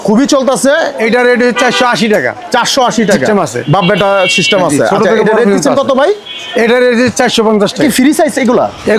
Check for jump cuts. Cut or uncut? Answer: cut